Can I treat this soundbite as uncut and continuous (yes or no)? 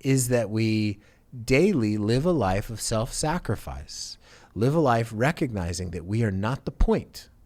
yes